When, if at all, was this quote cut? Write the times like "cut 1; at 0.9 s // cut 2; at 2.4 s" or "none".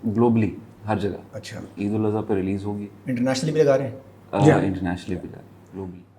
none

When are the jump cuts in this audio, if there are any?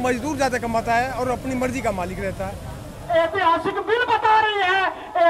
cut 1; at 3.0 s

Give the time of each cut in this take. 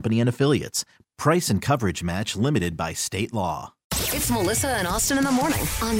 cut 1; at 3.8 s

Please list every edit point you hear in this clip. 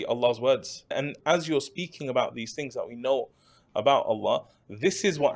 cut 1; at 1.2 s

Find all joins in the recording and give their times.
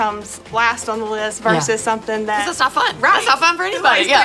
cut 1; at 2.4 s

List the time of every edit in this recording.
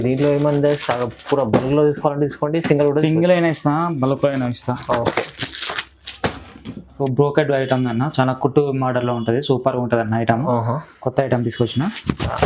cut 1; at 6.9 s

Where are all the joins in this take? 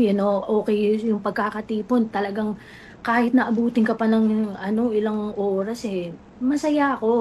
none

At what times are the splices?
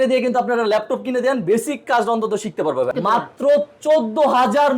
cut 1; at 2.9 s

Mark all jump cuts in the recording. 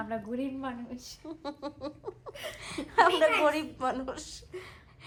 none

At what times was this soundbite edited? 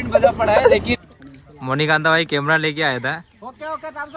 cut 1; at 0.9 s

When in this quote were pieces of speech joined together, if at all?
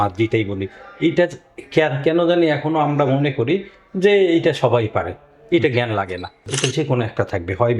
cut 1; at 6.4 s

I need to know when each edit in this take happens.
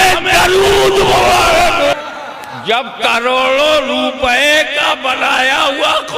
cut 1; at 1.9 s

